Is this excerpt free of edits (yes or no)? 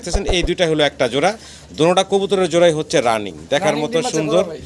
yes